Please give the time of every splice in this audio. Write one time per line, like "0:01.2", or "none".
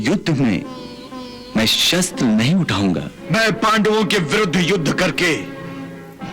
0:03.1